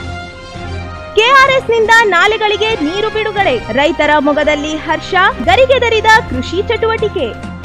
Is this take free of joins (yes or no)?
yes